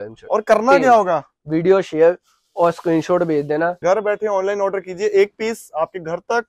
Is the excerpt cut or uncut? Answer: cut